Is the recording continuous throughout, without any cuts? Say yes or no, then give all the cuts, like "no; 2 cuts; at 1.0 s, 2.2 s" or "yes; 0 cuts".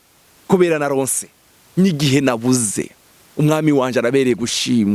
yes; 0 cuts